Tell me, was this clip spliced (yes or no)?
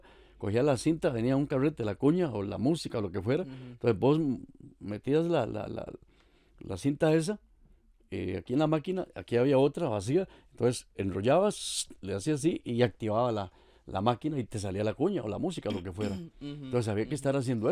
no